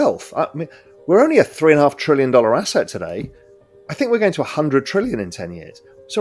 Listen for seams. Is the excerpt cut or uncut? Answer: uncut